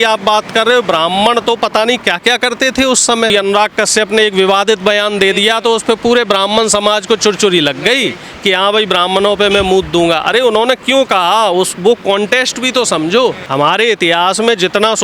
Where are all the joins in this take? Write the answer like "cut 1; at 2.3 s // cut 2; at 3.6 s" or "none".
cut 1; at 3.3 s // cut 2; at 13.4 s